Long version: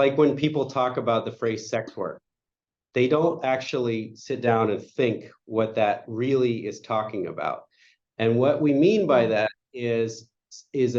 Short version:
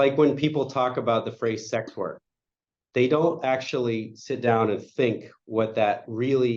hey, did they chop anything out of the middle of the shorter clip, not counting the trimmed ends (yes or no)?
no